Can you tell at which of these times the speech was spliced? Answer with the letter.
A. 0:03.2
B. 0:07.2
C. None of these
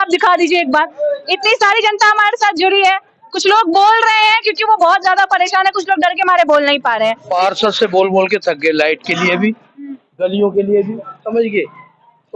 B